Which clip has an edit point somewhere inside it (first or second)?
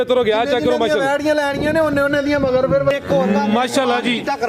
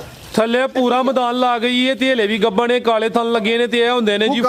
first